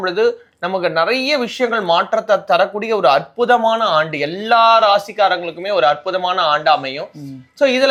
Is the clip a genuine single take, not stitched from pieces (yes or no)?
yes